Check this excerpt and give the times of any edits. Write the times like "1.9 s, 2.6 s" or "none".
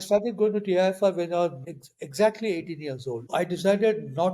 1.6 s, 3.3 s